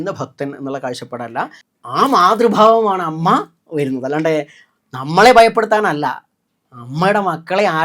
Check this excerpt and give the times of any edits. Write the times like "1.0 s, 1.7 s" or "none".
1.7 s